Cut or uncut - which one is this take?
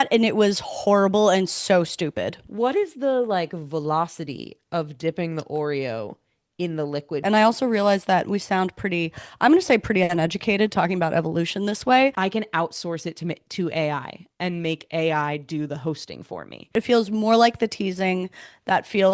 cut